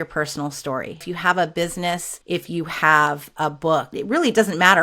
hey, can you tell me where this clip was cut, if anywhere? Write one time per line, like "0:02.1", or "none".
0:01.0
0:02.1
0:03.9